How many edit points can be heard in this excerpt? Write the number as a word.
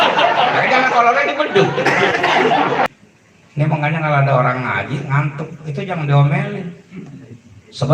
one